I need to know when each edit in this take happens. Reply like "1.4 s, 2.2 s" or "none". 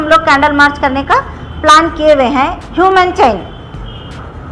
none

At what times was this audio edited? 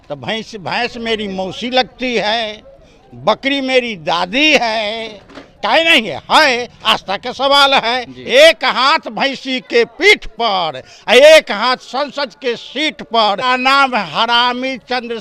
8.2 s, 13.4 s

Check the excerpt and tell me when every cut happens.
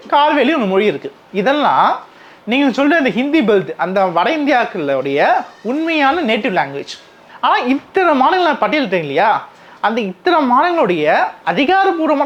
none

